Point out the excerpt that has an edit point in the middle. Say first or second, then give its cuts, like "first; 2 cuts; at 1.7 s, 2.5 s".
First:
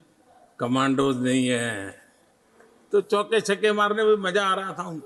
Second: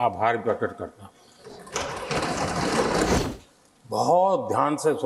second; 1 cut; at 3.2 s